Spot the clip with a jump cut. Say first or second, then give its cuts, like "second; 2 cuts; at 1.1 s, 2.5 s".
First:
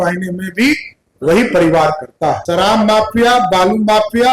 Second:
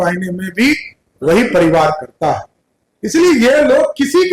first; 1 cut; at 2.4 s